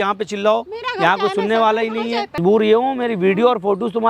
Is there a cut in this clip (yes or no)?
yes